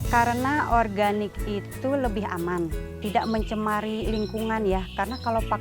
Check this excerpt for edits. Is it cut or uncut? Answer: cut